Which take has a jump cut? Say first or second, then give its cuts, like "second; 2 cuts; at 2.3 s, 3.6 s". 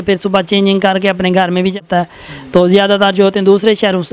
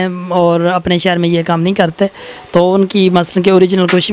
first; 1 cut; at 1.8 s